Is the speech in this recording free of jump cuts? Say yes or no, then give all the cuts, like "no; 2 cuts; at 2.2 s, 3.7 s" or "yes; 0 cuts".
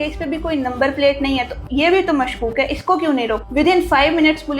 no; 1 cut; at 3.4 s